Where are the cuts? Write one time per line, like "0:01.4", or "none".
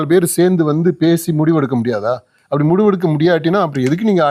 none